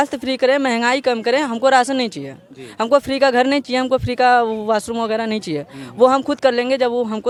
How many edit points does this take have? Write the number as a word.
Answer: zero